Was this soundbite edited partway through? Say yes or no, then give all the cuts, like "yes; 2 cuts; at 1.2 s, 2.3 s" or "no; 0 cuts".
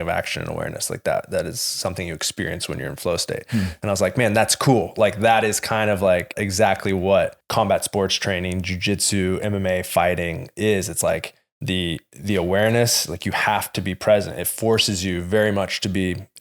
yes; 2 cuts; at 6.4 s, 7.4 s